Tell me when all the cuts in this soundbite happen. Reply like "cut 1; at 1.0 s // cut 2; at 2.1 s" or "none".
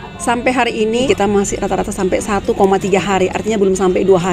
cut 1; at 1.0 s